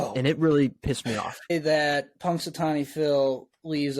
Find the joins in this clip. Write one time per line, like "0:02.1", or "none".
0:01.5